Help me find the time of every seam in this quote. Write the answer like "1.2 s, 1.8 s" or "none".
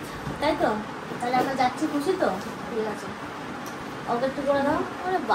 none